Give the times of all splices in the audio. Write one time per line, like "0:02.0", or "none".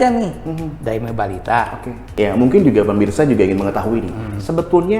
0:02.0